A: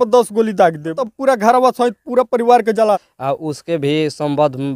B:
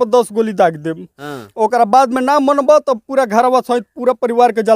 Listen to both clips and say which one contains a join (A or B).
A